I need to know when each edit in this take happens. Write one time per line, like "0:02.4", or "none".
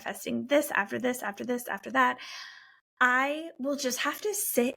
none